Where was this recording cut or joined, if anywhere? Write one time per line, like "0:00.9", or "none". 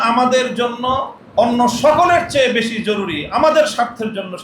0:01.2

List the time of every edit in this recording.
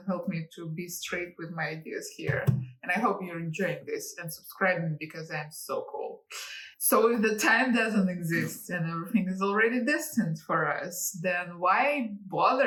none

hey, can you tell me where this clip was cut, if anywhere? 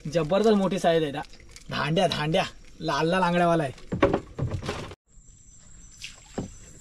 0:05.0

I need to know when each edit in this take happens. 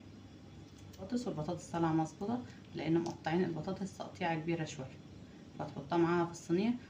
0:01.1

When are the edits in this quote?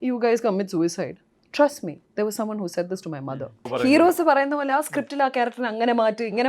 0:03.7

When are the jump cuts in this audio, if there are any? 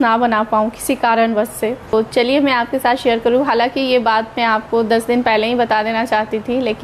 0:01.9

